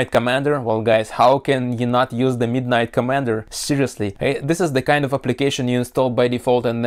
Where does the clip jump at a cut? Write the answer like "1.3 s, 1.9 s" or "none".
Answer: none